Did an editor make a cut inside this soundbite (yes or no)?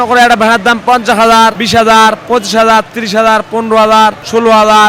no